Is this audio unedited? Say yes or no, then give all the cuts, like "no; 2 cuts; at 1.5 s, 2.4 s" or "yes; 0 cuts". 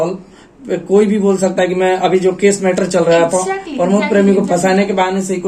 yes; 0 cuts